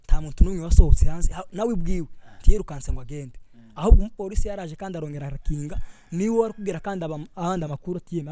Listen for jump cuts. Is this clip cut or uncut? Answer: uncut